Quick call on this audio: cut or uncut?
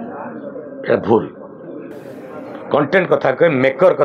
uncut